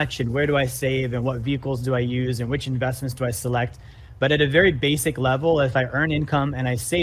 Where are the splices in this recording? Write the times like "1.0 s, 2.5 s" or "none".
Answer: none